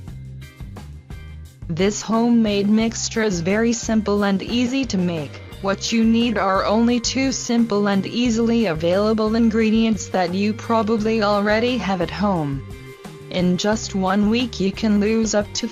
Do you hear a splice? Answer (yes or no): no